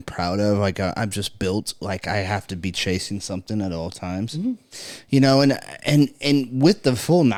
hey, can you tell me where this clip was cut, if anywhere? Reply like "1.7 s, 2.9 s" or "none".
none